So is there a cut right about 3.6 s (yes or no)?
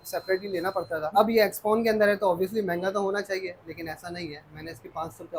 no